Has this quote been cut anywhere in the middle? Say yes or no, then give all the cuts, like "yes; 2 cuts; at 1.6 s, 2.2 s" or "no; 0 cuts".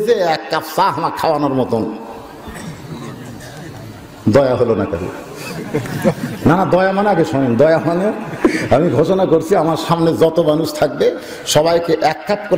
no; 0 cuts